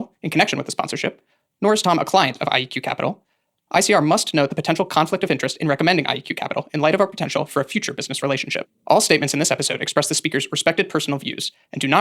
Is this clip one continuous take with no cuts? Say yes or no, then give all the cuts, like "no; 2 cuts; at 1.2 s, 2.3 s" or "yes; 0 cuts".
yes; 0 cuts